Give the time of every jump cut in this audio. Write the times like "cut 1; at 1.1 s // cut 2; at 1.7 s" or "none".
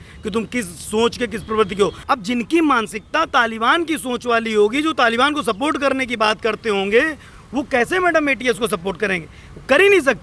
cut 1; at 2.0 s